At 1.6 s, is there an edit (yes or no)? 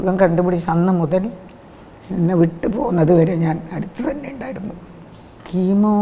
no